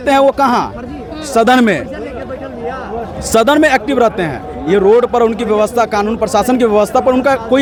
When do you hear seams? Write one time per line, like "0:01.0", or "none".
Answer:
none